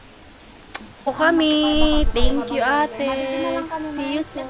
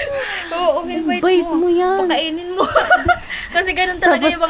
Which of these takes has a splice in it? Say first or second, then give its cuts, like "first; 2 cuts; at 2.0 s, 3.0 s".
first; 1 cut; at 0.9 s